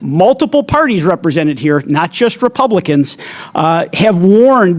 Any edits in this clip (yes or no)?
no